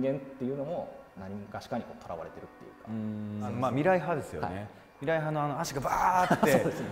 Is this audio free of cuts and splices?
no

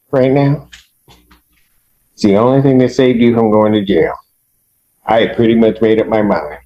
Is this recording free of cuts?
yes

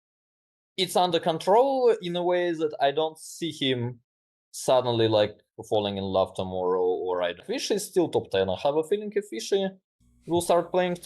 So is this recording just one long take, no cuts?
no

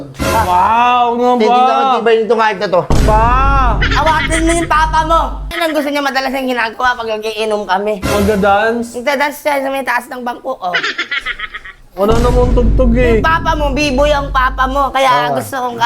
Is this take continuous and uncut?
no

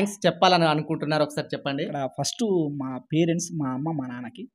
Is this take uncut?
no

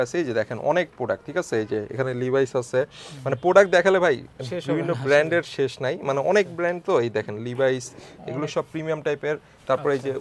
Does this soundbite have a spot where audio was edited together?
no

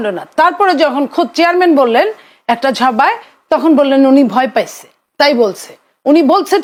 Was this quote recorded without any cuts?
yes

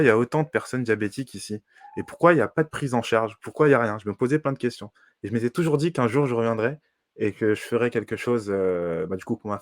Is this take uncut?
yes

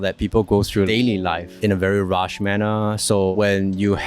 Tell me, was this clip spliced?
yes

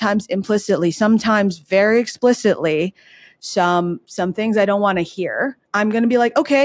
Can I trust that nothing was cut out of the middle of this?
no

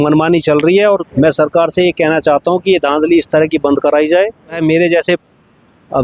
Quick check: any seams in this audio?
yes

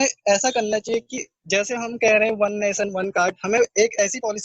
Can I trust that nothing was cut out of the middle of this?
yes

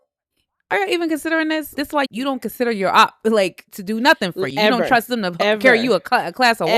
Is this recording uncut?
no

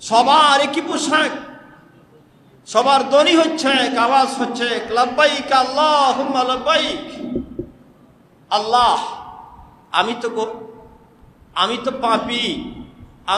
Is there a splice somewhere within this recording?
no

